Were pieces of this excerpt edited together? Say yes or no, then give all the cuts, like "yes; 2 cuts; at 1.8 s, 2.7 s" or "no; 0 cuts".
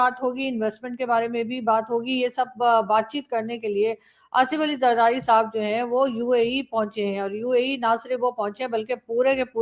no; 0 cuts